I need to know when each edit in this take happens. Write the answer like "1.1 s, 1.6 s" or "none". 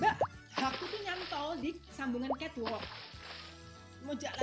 none